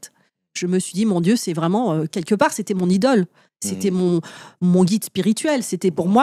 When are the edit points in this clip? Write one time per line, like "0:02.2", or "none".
none